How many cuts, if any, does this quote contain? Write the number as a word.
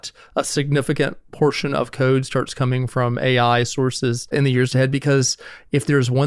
two